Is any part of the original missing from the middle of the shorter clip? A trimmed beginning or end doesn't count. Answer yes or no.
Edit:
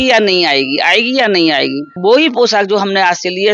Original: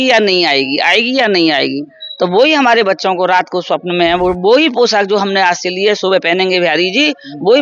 yes